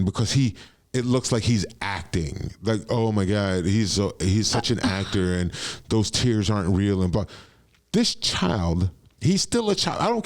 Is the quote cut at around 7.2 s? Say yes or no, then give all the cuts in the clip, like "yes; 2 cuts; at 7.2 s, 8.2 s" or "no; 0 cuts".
no; 1 cut; at 9.0 s